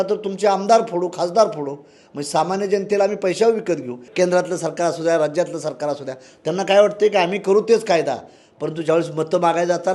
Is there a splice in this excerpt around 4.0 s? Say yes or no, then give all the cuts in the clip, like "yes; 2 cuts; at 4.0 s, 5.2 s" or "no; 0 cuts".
yes; 1 cut; at 4.0 s